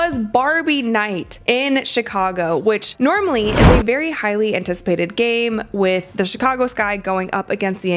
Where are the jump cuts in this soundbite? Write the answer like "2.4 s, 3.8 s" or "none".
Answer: none